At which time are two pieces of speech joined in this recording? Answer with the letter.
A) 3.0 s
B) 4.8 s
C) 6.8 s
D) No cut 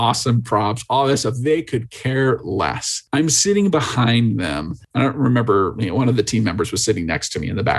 D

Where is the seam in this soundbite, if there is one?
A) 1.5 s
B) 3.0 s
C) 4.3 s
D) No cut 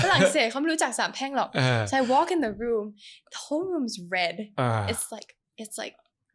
D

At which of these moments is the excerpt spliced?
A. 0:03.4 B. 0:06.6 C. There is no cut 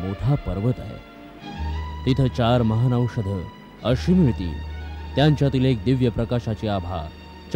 C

